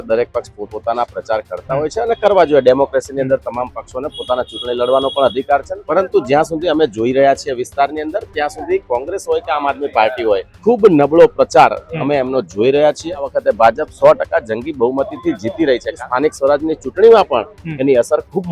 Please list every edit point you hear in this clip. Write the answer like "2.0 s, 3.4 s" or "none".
5.8 s, 10.5 s, 13.3 s, 16.0 s